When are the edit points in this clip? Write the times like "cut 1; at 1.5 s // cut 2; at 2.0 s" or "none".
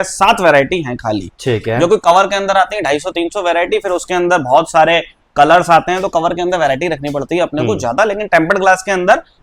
none